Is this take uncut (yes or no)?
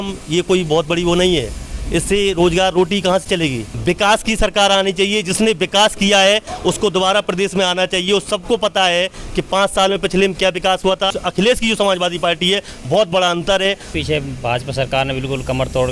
no